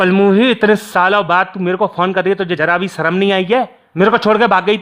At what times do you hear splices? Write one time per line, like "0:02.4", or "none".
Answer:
0:02.6
0:03.8